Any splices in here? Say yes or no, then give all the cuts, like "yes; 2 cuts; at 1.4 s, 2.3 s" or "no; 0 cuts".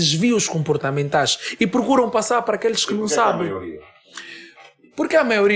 no; 0 cuts